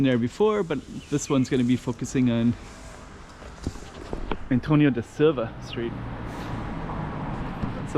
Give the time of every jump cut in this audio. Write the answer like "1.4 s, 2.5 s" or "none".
6.0 s